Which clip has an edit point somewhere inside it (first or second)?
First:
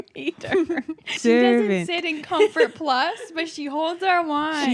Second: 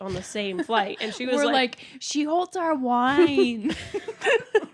first